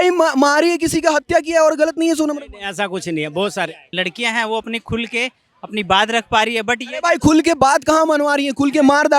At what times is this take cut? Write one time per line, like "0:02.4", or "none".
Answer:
0:03.9